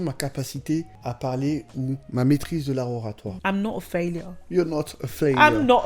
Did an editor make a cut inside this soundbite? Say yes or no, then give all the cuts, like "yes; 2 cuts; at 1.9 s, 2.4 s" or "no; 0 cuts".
yes; 3 cuts; at 0.9 s, 2.0 s, 3.3 s